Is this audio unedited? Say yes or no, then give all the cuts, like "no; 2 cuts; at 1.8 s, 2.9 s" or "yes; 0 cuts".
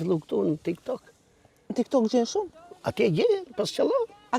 yes; 0 cuts